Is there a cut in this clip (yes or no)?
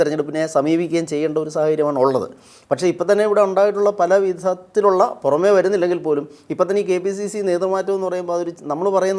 no